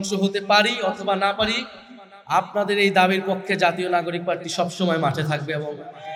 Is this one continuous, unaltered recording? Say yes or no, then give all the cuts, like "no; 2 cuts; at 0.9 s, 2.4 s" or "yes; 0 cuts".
yes; 0 cuts